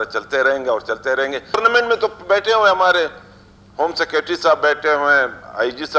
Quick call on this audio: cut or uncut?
cut